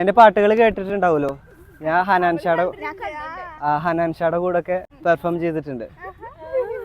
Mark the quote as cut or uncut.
cut